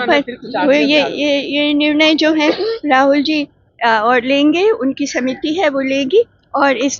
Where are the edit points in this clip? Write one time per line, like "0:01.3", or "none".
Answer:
none